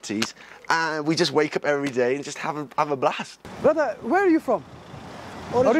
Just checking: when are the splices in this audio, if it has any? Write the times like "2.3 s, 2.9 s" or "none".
3.5 s